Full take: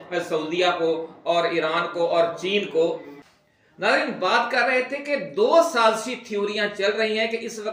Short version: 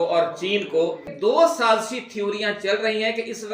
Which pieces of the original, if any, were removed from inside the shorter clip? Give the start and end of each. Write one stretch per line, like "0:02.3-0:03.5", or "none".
0:03.1-0:05.3